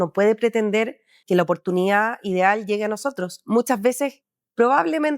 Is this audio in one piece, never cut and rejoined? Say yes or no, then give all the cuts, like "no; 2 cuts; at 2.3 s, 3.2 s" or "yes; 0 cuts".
no; 1 cut; at 1.1 s